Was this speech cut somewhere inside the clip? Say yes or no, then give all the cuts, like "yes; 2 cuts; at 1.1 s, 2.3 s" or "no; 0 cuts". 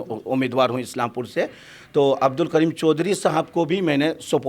no; 0 cuts